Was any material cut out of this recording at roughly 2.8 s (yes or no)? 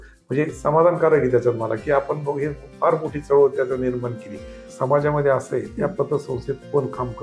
no